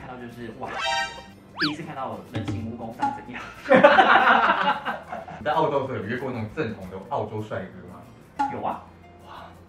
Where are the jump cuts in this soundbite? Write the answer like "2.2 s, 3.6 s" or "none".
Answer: none